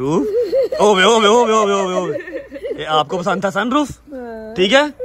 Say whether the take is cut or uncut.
uncut